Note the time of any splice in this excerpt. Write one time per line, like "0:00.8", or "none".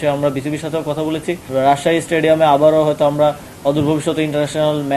0:01.4